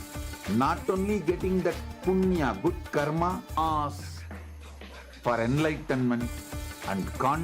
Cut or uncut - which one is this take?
cut